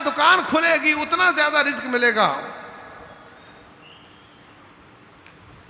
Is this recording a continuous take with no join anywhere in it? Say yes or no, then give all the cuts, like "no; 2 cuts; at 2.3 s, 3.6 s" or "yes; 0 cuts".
yes; 0 cuts